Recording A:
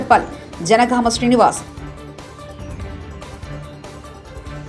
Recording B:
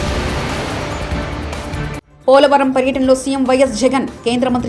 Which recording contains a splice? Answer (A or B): B